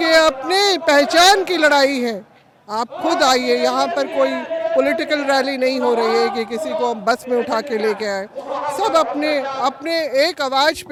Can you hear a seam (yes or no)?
no